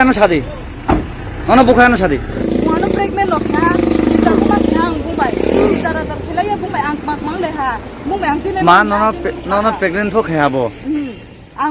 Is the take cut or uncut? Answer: cut